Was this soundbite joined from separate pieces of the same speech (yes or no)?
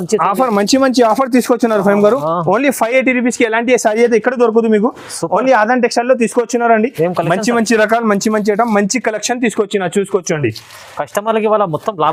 no